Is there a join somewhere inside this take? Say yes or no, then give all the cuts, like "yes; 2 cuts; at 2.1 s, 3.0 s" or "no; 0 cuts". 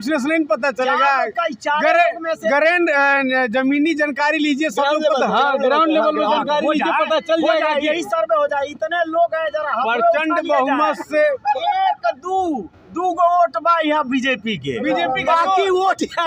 no; 0 cuts